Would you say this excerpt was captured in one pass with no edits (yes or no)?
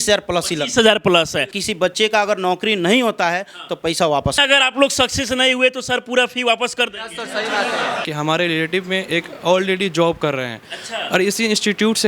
no